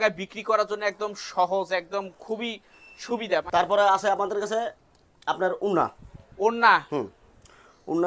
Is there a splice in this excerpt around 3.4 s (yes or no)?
yes